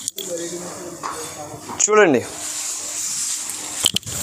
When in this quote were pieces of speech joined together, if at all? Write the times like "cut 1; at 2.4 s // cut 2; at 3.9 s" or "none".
none

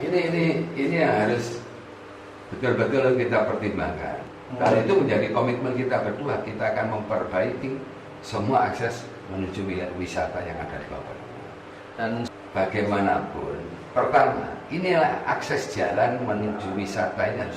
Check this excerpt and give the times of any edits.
cut 1; at 4.2 s // cut 2; at 12.2 s

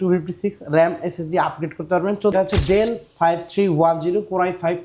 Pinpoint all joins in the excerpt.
cut 1; at 2.3 s

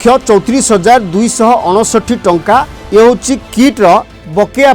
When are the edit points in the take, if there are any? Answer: cut 1; at 2.8 s

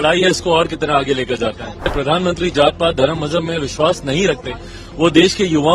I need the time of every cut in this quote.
cut 1; at 1.9 s

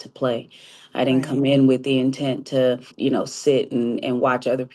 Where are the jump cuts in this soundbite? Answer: cut 1; at 2.9 s

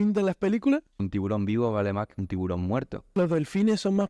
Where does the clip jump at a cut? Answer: cut 1; at 1.0 s // cut 2; at 3.2 s

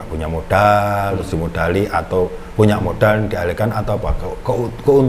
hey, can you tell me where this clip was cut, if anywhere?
none

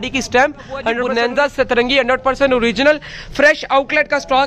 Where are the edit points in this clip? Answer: cut 1; at 1.0 s

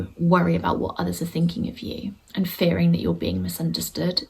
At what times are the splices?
cut 1; at 2.2 s

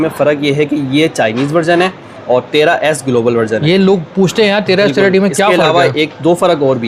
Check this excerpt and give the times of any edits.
none

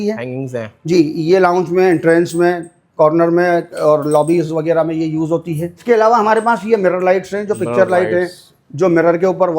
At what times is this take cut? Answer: cut 1; at 5.7 s

